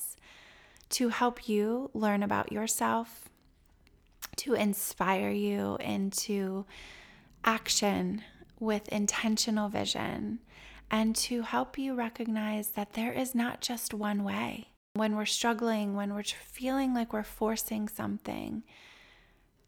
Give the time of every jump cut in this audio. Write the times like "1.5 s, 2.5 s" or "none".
14.9 s